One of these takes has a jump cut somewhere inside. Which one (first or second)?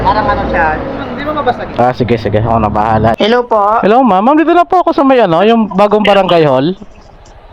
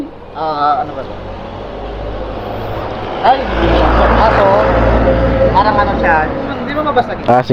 first